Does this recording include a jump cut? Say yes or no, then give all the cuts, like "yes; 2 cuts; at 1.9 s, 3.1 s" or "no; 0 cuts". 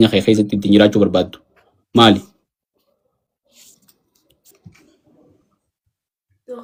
no; 0 cuts